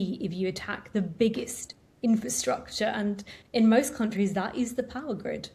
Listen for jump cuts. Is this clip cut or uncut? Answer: uncut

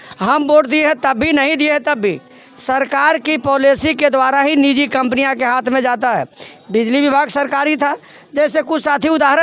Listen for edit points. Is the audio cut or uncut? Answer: uncut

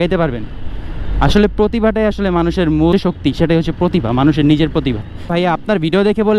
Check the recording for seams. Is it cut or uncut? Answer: cut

